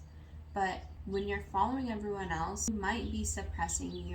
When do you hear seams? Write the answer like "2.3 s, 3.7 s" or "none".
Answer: 0.9 s, 2.7 s